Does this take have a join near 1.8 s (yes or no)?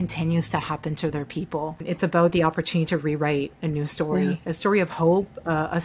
yes